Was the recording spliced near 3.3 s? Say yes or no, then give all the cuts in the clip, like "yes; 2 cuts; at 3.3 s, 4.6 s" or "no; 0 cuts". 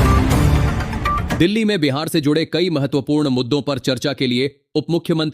no; 1 cut; at 1.4 s